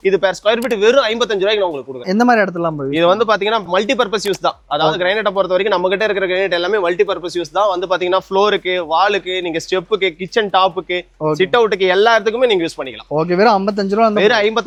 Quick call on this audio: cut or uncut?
uncut